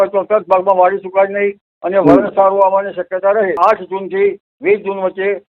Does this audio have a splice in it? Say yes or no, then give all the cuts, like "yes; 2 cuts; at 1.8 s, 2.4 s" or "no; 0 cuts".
yes; 1 cut; at 3.6 s